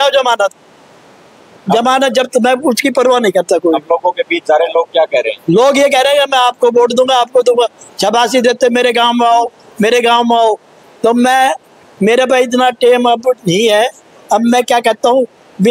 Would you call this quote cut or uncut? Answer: uncut